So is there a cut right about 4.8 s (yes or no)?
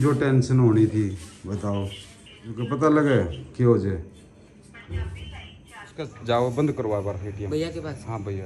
no